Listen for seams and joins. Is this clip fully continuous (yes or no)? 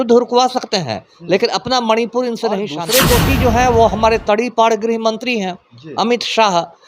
no